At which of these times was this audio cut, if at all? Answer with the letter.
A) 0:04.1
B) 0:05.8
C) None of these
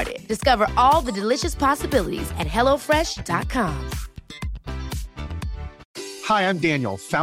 B